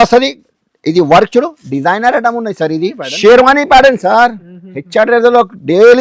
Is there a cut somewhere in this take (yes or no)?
yes